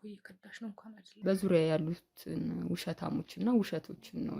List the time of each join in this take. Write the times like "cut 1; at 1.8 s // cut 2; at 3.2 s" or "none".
cut 1; at 1.1 s

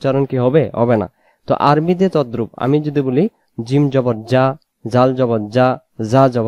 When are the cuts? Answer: none

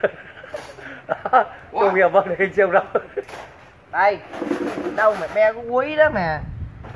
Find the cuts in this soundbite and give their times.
cut 1; at 1.5 s

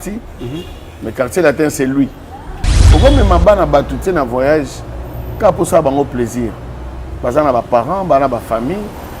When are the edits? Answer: cut 1; at 2.8 s

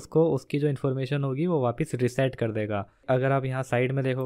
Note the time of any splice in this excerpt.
cut 1; at 3.0 s

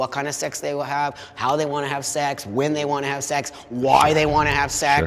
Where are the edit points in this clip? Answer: none

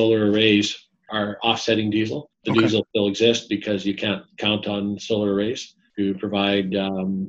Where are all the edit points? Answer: cut 1; at 1.1 s // cut 2; at 2.3 s // cut 3; at 2.9 s // cut 4; at 5.8 s

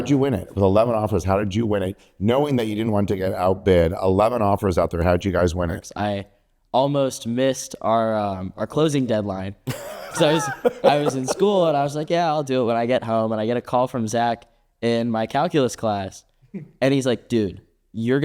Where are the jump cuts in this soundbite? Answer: cut 1; at 5.8 s

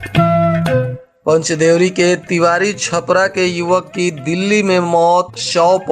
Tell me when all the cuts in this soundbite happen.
cut 1; at 0.9 s

